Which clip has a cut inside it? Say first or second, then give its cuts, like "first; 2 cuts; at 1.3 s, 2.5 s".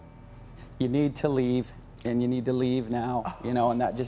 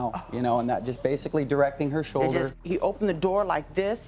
second; 1 cut; at 2.6 s